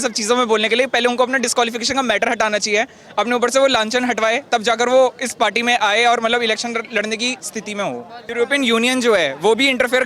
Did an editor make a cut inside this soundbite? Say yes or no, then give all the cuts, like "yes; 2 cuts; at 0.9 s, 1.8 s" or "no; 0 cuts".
yes; 1 cut; at 8.2 s